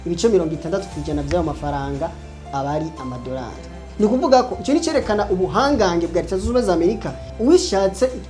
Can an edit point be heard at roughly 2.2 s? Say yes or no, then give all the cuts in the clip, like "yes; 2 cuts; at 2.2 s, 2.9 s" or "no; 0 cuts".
no; 1 cut; at 7.2 s